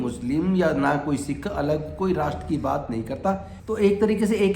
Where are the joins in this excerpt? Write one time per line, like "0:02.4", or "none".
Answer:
0:03.5